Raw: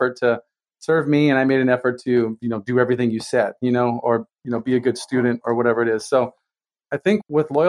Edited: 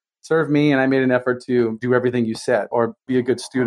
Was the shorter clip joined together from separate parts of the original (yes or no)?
yes